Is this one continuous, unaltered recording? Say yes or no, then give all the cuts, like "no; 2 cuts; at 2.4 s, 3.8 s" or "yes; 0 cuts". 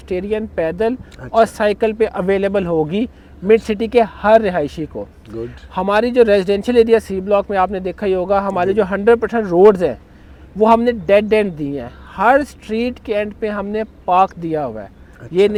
yes; 0 cuts